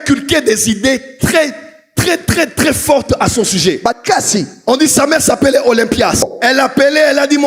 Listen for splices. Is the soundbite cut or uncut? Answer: cut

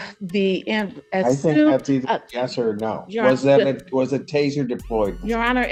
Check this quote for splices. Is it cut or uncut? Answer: uncut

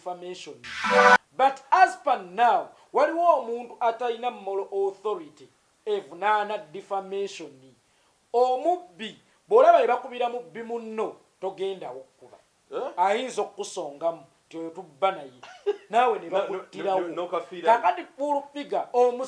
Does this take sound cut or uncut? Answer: uncut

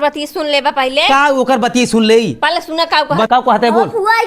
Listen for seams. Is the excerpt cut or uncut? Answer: cut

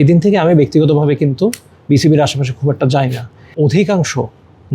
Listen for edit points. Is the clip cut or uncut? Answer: cut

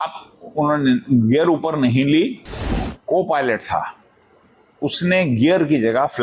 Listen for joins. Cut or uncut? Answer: cut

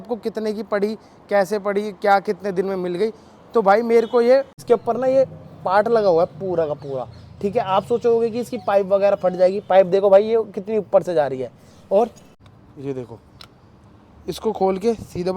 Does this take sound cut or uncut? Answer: cut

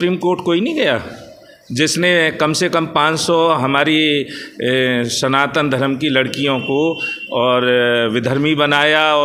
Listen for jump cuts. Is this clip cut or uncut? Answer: uncut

